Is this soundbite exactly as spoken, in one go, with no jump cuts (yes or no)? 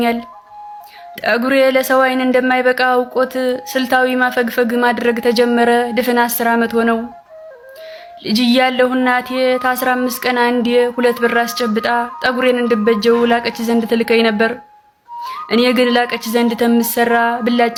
yes